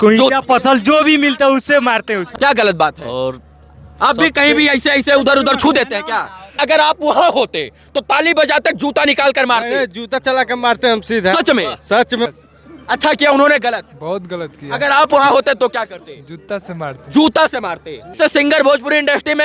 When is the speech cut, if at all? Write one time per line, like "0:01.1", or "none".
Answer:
0:02.3
0:06.6
0:12.3
0:18.1